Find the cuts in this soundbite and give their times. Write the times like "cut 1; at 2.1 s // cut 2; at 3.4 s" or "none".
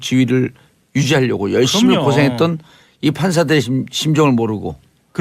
cut 1; at 3.3 s